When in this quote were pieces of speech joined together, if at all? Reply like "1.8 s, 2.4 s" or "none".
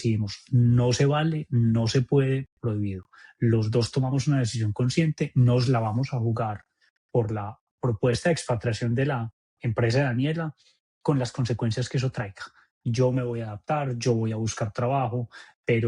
none